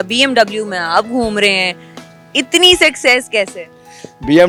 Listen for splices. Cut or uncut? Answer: uncut